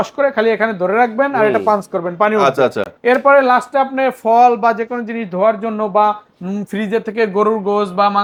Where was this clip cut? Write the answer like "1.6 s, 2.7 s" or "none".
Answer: none